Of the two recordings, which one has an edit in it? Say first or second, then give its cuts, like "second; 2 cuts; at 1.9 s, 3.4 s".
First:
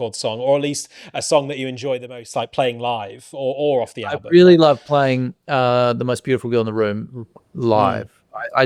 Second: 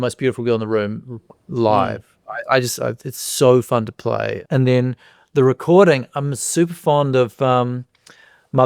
second; 1 cut; at 4.4 s